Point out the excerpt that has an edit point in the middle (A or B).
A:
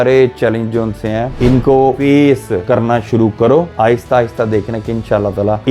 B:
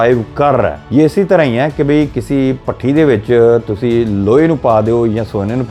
A